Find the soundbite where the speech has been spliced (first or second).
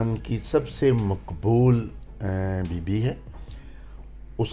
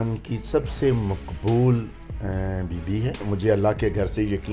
second